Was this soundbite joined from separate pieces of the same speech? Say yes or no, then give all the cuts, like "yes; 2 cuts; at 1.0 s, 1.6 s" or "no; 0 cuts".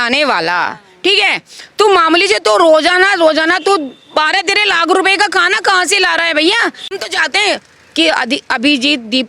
yes; 1 cut; at 6.9 s